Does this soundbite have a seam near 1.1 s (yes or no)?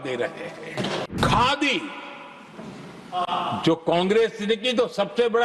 yes